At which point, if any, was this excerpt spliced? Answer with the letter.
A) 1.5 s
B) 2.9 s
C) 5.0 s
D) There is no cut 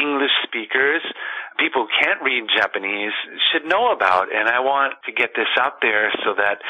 C